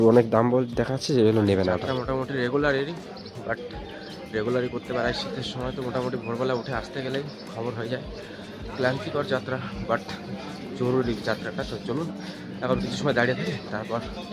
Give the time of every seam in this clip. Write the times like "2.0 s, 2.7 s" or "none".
1.9 s

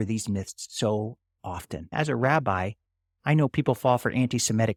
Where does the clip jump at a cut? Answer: none

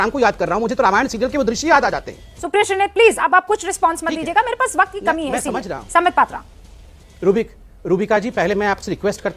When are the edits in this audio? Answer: none

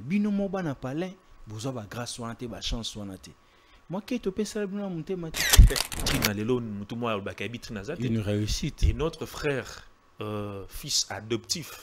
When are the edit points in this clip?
5.9 s

